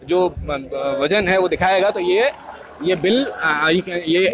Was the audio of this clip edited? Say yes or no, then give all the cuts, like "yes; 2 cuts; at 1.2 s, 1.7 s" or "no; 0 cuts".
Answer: no; 0 cuts